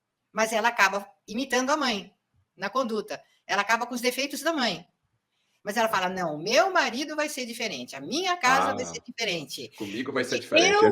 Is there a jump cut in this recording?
no; 0 cuts

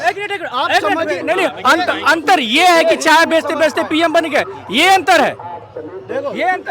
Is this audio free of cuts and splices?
yes; 0 cuts

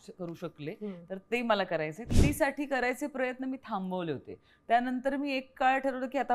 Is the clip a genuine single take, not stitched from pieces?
no; 1 cut; at 2.1 s

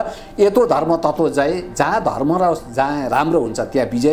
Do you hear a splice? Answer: no; 0 cuts

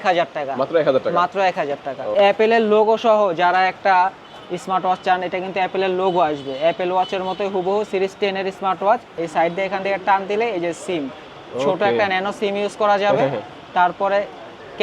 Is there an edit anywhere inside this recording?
yes; 2 cuts; at 2.1 s, 9.2 s

